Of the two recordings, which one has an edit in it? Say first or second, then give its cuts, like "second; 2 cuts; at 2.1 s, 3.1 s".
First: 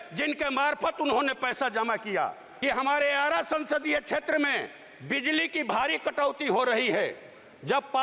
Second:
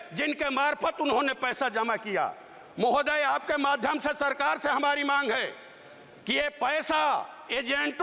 first; 1 cut; at 2.5 s